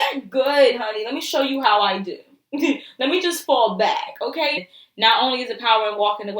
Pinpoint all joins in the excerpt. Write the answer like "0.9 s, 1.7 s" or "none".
4.6 s